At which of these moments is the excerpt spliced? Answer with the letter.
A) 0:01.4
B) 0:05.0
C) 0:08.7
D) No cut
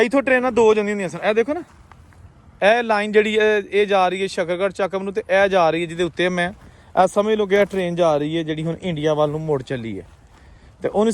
D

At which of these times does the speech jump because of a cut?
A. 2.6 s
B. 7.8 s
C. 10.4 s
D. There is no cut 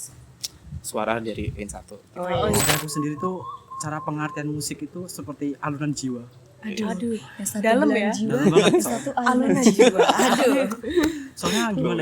A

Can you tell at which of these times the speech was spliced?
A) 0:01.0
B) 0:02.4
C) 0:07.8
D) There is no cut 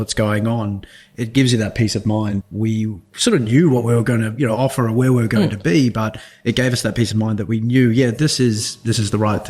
B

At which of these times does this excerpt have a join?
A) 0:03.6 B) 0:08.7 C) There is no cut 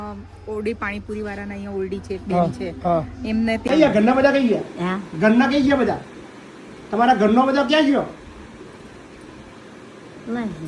A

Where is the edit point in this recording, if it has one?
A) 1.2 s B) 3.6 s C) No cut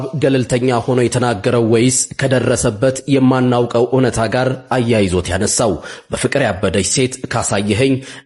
C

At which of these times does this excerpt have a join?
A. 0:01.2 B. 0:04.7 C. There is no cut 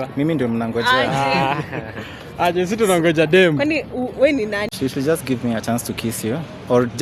B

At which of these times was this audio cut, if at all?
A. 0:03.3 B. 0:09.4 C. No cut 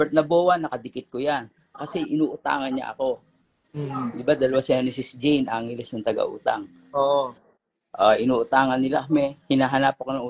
B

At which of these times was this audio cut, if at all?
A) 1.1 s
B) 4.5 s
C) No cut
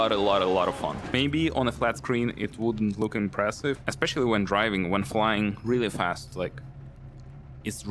A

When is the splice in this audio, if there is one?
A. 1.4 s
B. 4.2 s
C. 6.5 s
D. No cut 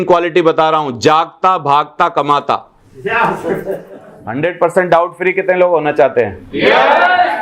B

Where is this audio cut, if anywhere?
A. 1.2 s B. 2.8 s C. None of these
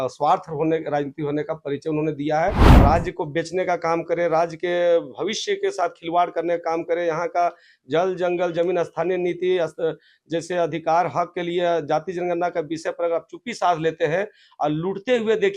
B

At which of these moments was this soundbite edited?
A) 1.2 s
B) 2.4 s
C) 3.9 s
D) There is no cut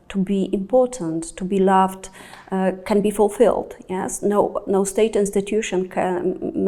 D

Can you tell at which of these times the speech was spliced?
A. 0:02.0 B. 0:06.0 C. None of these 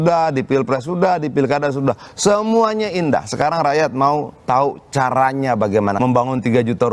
B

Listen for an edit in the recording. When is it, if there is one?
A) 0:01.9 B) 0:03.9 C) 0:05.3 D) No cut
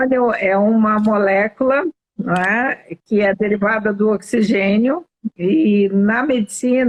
D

